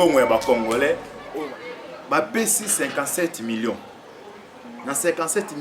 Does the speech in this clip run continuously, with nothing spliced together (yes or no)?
no